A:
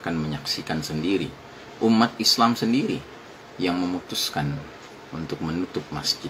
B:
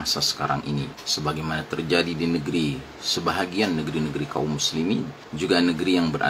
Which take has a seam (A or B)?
B